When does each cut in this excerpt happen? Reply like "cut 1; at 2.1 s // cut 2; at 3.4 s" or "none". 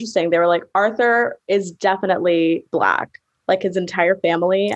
none